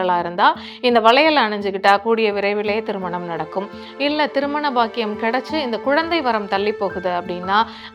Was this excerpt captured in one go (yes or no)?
yes